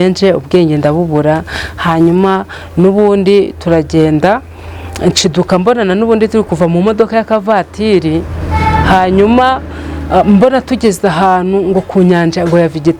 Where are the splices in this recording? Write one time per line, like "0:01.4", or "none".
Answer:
none